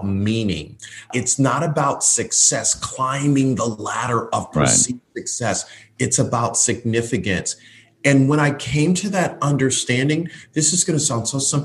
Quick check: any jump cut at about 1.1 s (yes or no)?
yes